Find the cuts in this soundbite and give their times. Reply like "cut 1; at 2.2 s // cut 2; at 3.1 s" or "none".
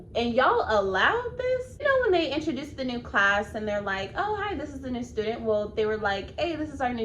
cut 1; at 1.7 s